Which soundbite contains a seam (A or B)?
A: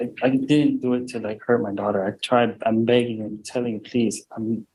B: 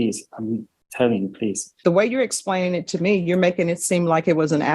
B